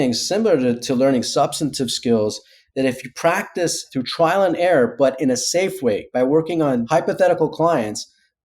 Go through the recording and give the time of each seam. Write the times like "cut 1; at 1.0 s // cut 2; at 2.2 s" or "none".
cut 1; at 3.8 s // cut 2; at 6.8 s